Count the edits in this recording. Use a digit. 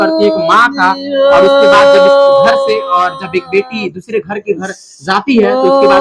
0